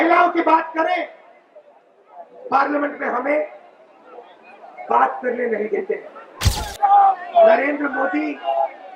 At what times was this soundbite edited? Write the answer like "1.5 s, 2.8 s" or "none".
6.7 s